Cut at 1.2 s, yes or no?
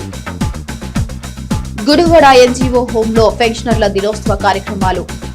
yes